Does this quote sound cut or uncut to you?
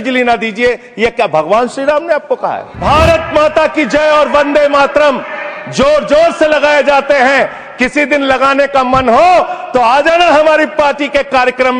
cut